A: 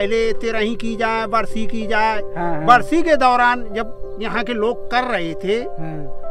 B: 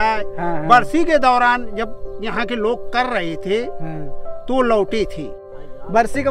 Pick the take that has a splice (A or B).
B